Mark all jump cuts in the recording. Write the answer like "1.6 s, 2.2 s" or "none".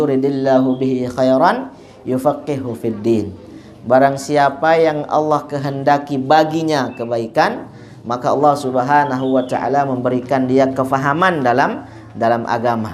none

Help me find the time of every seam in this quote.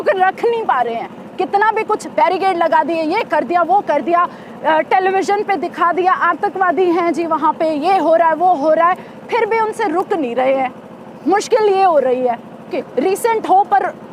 12.7 s

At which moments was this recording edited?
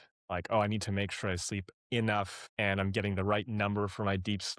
2.4 s

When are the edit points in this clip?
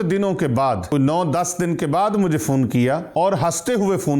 0.9 s, 3.1 s

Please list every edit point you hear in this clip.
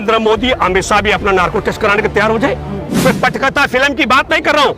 2.9 s

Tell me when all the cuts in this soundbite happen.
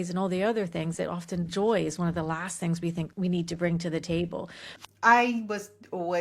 3.1 s, 4.7 s

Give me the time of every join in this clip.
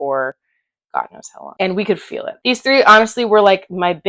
2.4 s

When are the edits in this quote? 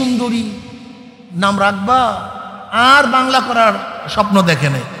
none

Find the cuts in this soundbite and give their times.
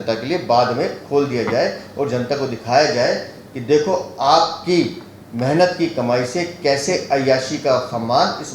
none

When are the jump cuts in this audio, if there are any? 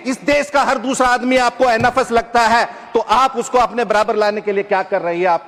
none

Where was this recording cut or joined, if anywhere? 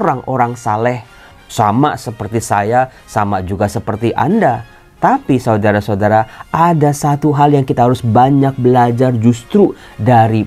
1.3 s

